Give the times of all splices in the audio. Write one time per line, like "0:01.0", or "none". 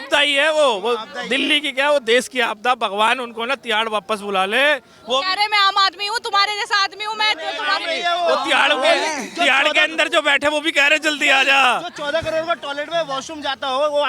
none